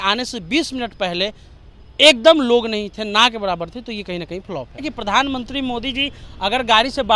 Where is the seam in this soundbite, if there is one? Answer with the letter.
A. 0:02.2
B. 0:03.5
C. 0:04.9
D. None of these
C